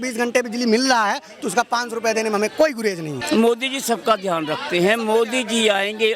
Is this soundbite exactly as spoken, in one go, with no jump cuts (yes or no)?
no